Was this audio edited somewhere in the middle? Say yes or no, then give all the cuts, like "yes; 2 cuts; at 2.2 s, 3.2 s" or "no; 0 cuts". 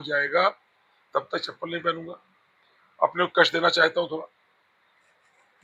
no; 0 cuts